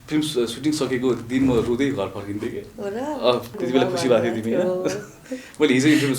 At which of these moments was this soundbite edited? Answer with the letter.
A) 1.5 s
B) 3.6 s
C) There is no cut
B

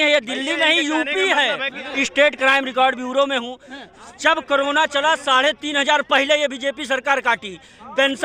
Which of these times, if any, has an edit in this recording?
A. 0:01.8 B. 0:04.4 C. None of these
A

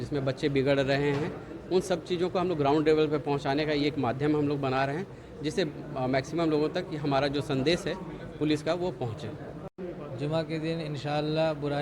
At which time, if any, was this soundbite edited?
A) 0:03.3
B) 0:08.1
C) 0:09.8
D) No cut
C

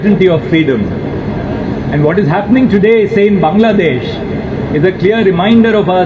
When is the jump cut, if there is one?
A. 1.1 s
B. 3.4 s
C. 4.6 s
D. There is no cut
D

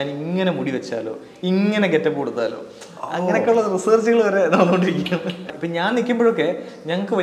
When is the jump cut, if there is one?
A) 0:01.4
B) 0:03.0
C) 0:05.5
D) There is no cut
C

